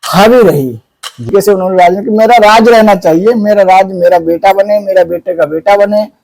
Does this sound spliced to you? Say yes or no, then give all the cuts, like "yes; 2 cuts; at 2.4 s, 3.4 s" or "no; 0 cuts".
yes; 1 cut; at 1.3 s